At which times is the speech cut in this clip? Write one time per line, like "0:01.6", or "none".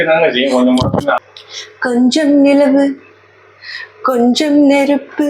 0:01.2

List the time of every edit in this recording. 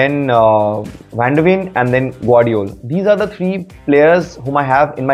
none

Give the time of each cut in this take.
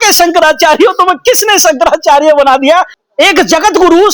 0:03.0

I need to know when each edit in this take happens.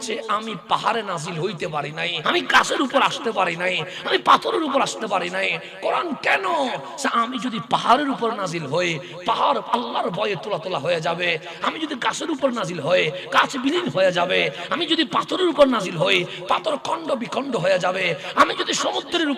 0:02.1

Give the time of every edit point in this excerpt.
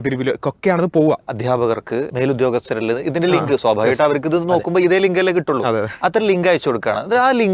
0:01.3
0:02.1

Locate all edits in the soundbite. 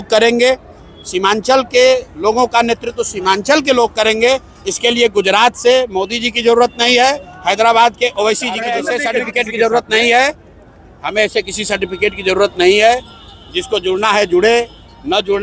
0:08.7

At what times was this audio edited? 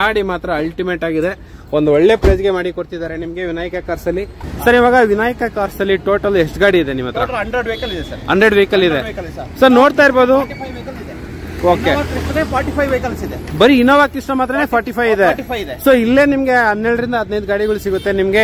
0:04.5

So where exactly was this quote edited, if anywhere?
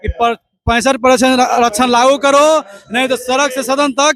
none

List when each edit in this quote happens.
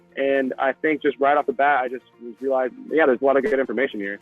0:02.8

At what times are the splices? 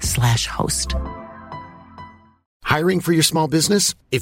0:02.5

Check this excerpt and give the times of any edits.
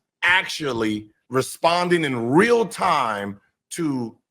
0:01.2

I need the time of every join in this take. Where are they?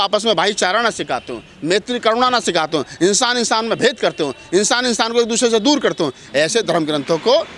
none

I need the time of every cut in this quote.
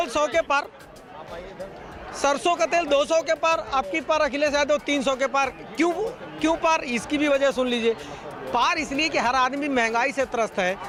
none

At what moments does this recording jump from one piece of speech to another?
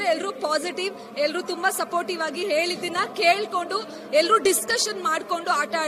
none

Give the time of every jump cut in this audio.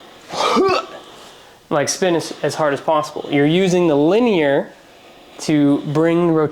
none

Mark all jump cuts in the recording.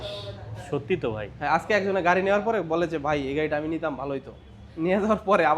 none

